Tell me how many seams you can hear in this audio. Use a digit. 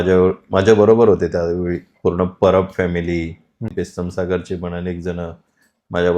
1